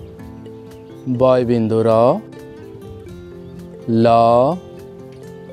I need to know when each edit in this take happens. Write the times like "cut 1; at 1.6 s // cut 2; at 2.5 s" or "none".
cut 1; at 2.3 s // cut 2; at 3.8 s // cut 3; at 4.6 s